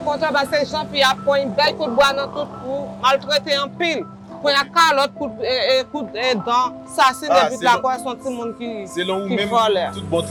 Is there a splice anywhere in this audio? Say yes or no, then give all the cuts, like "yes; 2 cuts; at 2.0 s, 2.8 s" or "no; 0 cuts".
no; 0 cuts